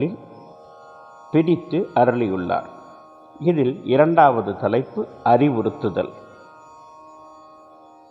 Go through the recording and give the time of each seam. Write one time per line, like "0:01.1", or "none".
0:07.1